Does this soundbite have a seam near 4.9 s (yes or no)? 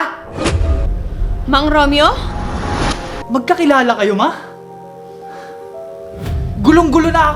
no